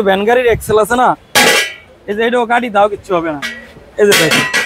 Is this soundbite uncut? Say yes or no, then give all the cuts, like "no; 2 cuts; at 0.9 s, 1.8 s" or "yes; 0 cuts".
yes; 0 cuts